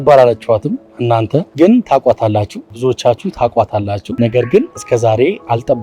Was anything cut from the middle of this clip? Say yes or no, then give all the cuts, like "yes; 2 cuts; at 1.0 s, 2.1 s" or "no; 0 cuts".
yes; 3 cuts; at 1.5 s, 2.6 s, 4.0 s